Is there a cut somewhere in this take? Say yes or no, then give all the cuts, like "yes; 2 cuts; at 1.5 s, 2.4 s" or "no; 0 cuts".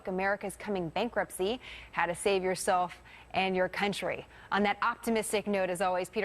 yes; 1 cut; at 5.2 s